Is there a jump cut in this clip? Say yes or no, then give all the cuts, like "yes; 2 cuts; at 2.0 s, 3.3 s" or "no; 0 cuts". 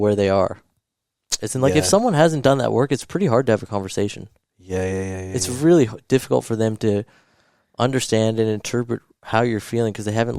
no; 0 cuts